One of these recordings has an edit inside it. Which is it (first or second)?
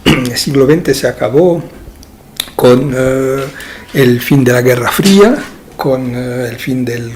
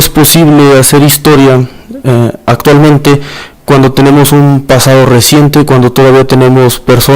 second